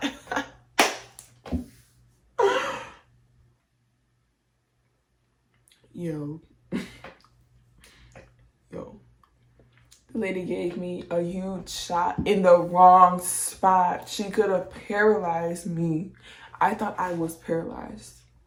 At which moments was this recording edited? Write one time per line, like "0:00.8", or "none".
none